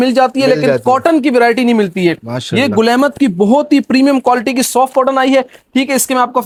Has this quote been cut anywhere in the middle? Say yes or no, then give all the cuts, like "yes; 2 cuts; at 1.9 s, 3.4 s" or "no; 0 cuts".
no; 0 cuts